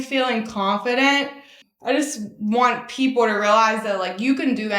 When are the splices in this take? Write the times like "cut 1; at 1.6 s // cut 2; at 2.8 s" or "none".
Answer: none

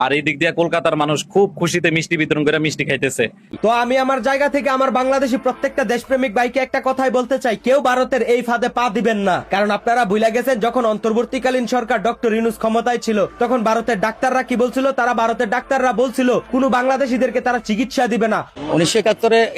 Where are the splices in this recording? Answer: cut 1; at 3.5 s // cut 2; at 18.5 s

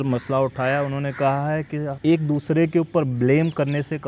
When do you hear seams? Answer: cut 1; at 1.9 s

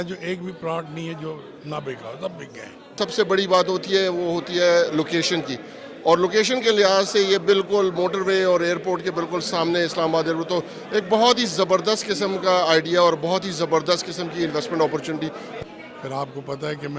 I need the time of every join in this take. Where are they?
cut 1; at 2.9 s // cut 2; at 15.5 s

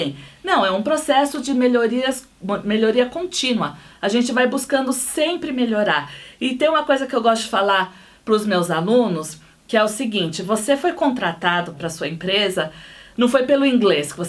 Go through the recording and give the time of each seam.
cut 1; at 11.8 s

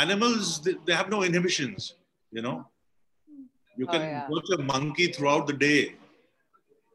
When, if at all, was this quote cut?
none

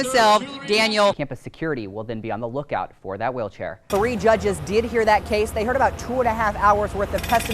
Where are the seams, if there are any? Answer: cut 1; at 1.3 s // cut 2; at 3.7 s

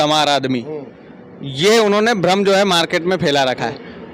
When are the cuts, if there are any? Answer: none

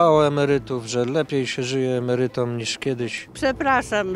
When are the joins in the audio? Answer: cut 1; at 3.2 s

